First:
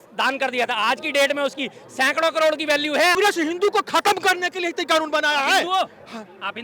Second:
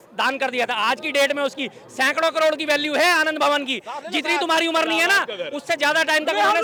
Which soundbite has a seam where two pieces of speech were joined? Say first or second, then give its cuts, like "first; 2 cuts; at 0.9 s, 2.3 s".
first; 1 cut; at 3.2 s